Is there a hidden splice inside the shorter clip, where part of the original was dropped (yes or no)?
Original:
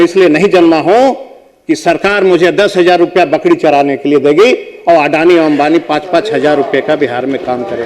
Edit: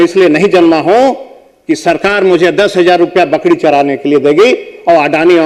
no